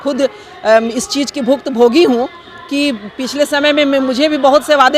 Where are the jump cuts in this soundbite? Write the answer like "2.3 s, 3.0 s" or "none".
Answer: none